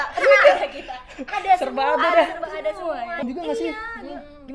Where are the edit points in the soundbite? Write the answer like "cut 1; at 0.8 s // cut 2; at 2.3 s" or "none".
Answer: cut 1; at 3.2 s